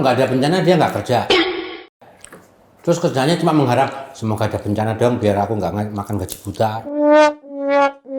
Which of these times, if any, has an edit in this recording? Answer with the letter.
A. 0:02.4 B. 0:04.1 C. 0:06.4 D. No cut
D